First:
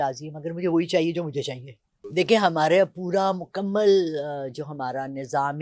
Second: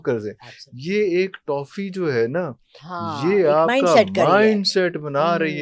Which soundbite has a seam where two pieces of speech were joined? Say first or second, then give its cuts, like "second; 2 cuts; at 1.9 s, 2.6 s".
first; 1 cut; at 2.1 s